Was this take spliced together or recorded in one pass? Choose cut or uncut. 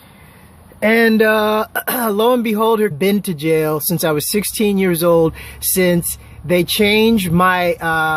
uncut